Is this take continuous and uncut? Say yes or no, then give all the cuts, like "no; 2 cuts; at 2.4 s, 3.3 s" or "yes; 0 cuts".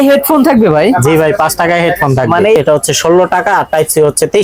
no; 1 cut; at 2.6 s